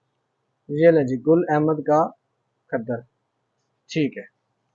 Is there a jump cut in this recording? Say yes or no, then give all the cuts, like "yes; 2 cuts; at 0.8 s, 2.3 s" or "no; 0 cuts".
no; 0 cuts